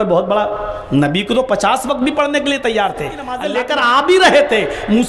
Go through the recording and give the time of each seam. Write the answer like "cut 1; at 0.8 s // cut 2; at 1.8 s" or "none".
cut 1; at 3.3 s